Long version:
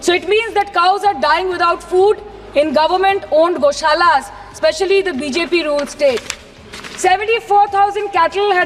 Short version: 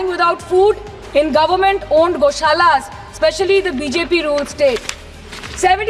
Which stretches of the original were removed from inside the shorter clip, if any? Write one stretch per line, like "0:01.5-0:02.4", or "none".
none